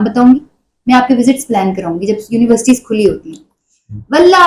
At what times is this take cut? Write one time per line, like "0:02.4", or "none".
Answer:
none